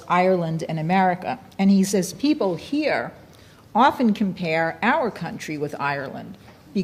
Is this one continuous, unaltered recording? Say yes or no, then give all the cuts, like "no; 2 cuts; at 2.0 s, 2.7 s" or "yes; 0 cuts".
yes; 0 cuts